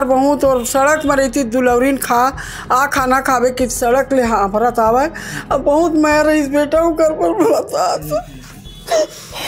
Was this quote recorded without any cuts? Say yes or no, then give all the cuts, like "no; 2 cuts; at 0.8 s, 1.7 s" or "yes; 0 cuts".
yes; 0 cuts